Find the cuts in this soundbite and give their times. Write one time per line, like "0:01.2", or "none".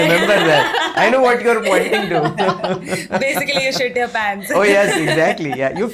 none